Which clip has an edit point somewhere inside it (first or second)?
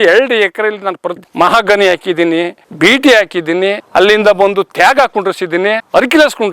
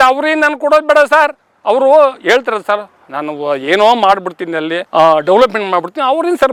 first